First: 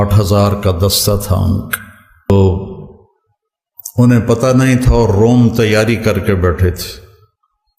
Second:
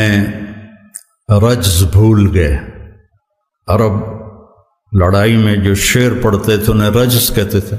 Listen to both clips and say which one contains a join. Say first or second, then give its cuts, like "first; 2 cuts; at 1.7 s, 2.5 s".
first; 1 cut; at 2.3 s